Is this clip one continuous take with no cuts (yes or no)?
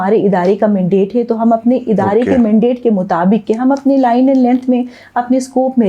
yes